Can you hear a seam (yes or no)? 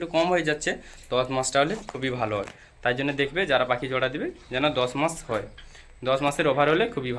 no